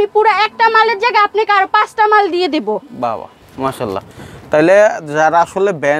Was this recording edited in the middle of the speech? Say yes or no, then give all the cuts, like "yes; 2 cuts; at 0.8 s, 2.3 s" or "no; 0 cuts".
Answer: no; 0 cuts